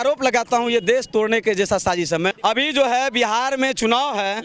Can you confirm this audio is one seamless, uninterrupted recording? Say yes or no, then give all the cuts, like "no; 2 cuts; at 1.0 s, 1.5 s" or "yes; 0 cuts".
no; 1 cut; at 2.4 s